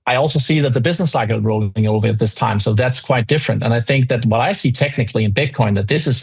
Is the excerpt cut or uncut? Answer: uncut